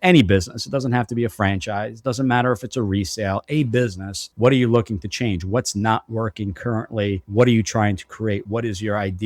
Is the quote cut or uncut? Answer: uncut